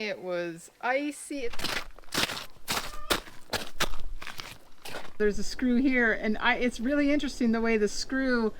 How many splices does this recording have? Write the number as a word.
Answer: two